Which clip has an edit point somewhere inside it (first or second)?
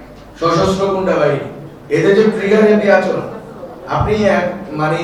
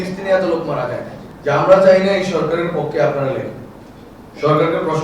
second